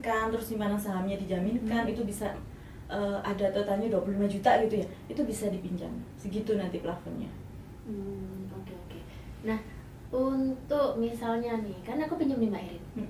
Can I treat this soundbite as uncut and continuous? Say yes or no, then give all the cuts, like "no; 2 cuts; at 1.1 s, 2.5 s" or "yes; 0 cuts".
yes; 0 cuts